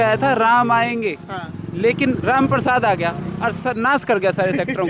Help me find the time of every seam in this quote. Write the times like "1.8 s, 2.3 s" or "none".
none